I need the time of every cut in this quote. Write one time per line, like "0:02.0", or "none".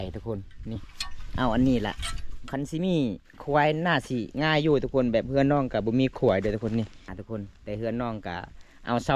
0:07.2